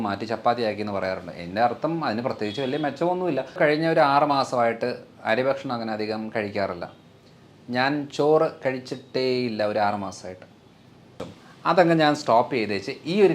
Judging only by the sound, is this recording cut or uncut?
cut